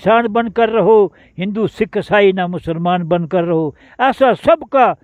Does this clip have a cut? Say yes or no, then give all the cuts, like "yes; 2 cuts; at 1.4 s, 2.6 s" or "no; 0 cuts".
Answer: no; 0 cuts